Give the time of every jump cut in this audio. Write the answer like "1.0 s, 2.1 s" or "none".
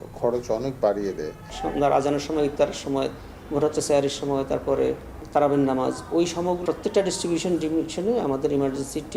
1.5 s, 5.1 s, 6.6 s